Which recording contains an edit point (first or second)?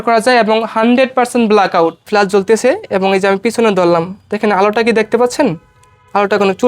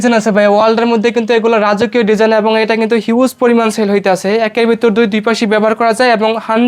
first